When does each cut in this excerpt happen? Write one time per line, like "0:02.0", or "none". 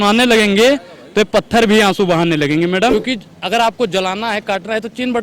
0:02.9